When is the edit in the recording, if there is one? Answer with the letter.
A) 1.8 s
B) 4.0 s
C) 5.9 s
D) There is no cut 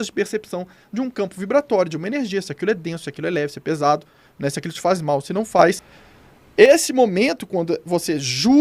C